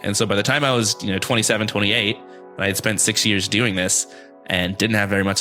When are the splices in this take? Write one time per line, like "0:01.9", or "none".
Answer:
none